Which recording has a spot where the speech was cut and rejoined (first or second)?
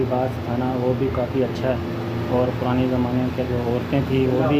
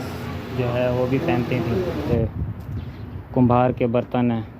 second